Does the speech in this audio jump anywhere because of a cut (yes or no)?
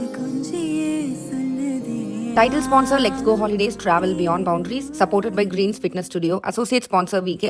no